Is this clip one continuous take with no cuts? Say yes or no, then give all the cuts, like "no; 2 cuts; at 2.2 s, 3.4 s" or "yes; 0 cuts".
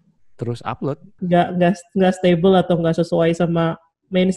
no; 1 cut; at 1.1 s